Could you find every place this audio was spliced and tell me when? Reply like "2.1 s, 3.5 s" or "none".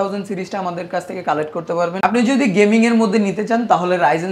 1.9 s